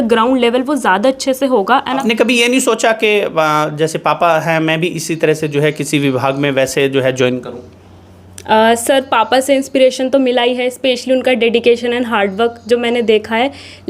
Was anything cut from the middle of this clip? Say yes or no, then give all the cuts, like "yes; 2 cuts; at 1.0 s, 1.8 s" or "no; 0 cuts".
yes; 1 cut; at 2.0 s